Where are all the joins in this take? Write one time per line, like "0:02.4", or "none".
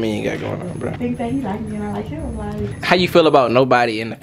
0:01.0
0:02.7